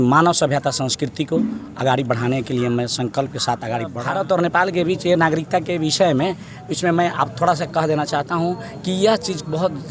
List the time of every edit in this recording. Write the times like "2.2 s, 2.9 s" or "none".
4.0 s